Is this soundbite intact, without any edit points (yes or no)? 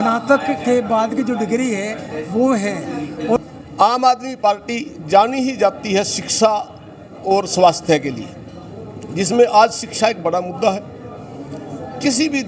no